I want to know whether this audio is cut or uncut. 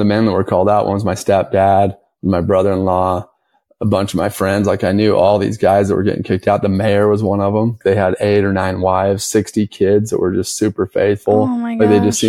cut